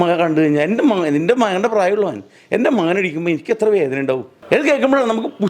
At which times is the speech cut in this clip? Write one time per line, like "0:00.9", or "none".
0:04.3